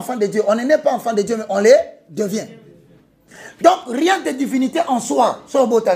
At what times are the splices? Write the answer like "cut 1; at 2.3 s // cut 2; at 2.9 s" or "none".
cut 1; at 3.3 s